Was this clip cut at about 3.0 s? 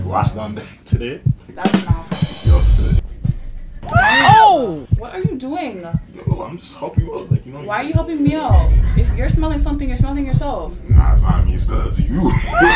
yes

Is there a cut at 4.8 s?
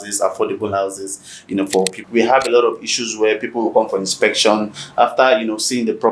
no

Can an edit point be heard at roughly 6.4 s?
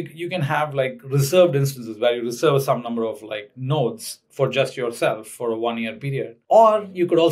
yes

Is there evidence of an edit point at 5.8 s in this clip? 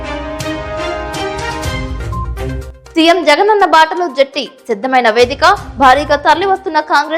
no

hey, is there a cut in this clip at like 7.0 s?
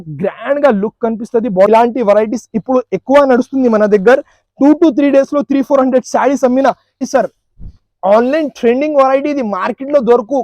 yes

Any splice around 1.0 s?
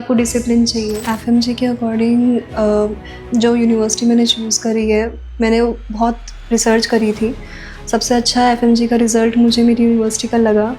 yes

